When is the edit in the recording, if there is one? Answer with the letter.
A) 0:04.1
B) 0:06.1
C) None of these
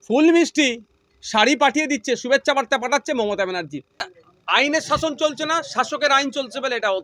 A